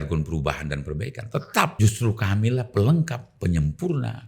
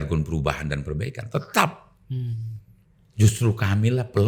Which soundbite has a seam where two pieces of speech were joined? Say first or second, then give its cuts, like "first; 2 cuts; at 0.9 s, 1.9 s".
first; 1 cut; at 1.7 s